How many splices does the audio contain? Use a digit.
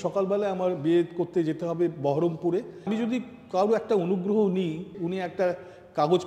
2